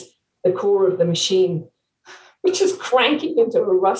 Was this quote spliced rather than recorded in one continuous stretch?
no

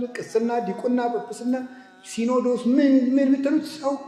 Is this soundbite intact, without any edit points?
yes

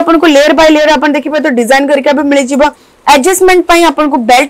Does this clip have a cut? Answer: no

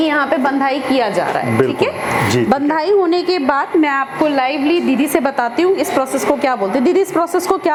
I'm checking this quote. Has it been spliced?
no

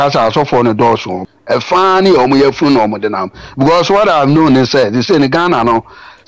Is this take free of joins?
no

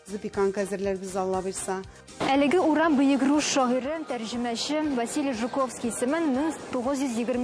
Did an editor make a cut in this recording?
yes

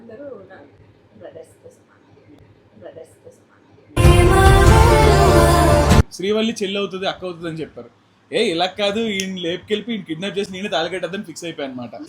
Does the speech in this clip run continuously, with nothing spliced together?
no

